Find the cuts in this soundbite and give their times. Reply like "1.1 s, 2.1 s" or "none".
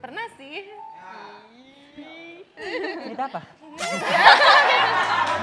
3.1 s